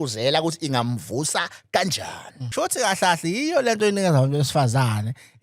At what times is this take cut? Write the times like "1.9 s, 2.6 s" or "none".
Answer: 2.4 s